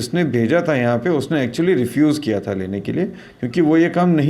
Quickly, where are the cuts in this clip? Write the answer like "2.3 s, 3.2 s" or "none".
none